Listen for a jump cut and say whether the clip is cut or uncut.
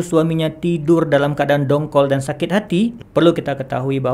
cut